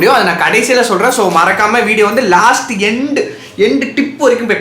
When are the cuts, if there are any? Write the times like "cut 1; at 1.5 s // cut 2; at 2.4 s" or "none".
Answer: none